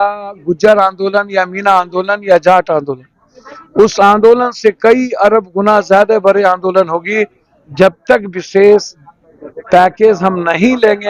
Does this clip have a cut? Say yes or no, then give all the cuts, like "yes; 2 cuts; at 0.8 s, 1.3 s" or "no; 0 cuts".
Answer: no; 0 cuts